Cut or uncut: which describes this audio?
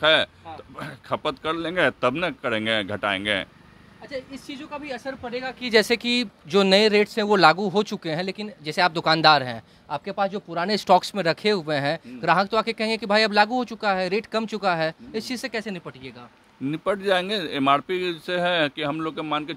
uncut